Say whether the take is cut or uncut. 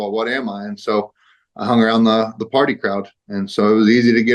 uncut